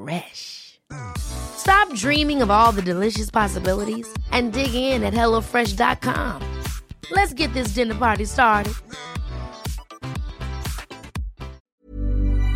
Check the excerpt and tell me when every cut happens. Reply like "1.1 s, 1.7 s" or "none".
11.6 s